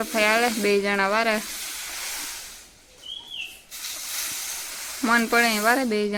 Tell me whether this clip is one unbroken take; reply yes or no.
yes